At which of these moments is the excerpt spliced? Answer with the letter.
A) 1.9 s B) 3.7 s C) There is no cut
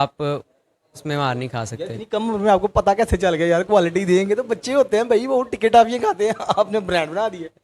C